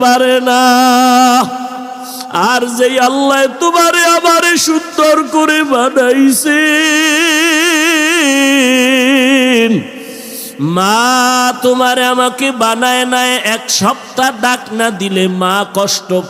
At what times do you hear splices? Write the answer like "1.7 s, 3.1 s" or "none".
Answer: none